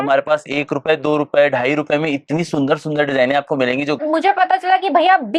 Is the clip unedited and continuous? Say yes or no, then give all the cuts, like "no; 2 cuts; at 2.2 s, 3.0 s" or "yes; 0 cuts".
no; 1 cut; at 4.0 s